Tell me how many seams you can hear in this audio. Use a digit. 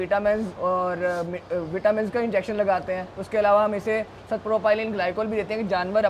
0